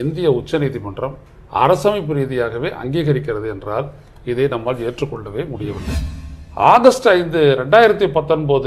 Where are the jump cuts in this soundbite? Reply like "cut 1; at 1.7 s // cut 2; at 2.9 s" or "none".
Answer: cut 1; at 5.9 s